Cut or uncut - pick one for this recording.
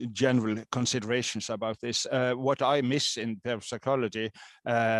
uncut